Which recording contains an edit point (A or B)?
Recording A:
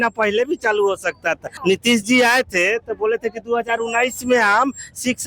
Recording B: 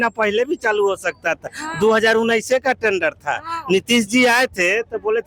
A